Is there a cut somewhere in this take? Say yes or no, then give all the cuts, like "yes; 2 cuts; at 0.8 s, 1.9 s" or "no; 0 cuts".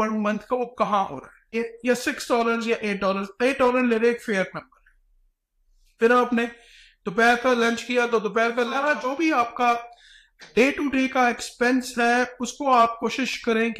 yes; 2 cuts; at 1.6 s, 8.7 s